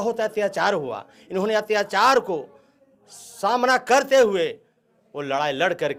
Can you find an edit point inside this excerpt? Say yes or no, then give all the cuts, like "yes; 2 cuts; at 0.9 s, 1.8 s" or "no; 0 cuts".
no; 0 cuts